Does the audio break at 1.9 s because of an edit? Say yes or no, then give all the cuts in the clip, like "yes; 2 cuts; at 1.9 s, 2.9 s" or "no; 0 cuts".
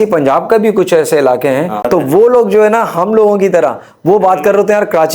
yes; 1 cut; at 1.9 s